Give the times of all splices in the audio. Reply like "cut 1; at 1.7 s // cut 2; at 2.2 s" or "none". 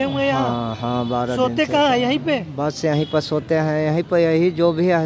none